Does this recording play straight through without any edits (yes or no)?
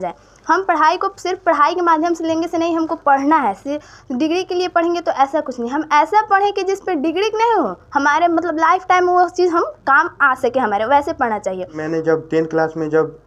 no